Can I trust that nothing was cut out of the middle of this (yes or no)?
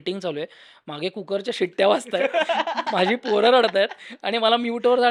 yes